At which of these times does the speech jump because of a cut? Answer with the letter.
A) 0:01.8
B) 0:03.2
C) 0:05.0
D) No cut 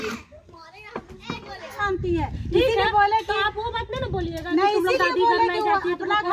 A